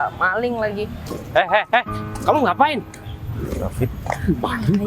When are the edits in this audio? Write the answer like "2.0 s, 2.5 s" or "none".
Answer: 1.0 s